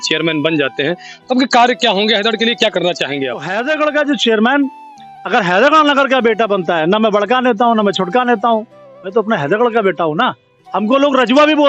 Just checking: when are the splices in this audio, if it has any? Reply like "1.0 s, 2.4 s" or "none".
3.5 s